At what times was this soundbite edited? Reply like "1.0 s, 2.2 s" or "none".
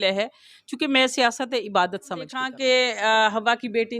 2.4 s